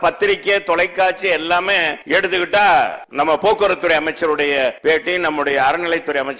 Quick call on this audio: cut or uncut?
cut